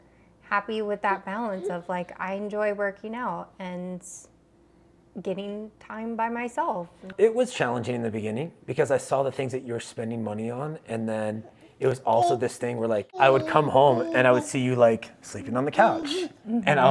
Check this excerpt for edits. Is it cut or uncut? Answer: cut